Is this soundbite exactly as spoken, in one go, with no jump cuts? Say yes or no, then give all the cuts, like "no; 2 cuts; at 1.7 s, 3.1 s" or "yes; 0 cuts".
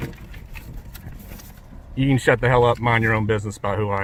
yes; 0 cuts